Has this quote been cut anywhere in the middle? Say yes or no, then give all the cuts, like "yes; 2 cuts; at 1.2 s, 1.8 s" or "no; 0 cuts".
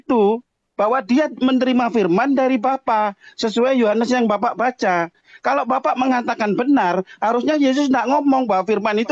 no; 0 cuts